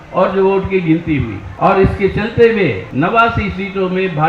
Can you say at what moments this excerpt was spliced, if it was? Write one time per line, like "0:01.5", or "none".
0:01.4
0:02.8